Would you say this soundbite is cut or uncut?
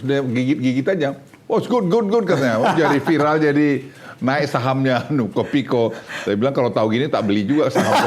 uncut